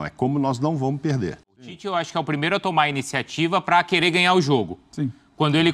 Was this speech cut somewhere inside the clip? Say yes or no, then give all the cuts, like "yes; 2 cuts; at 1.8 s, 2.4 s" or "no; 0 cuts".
yes; 1 cut; at 1.7 s